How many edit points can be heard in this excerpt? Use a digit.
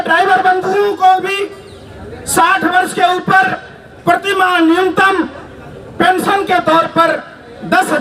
0